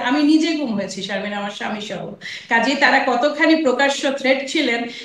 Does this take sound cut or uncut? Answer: uncut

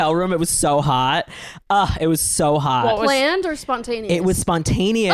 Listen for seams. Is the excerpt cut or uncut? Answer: uncut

